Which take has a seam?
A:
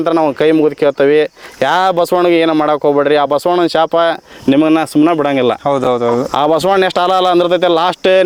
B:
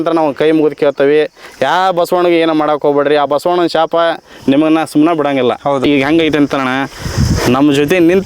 B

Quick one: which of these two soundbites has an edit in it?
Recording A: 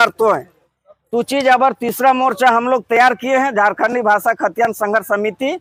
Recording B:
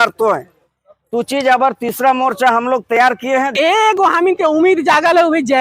B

